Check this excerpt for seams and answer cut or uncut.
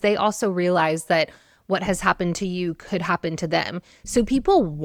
uncut